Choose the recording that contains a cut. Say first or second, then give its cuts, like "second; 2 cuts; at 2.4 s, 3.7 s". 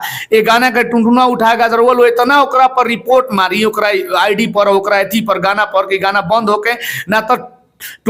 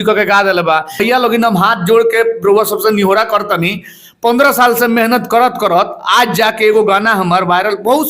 second; 1 cut; at 1.0 s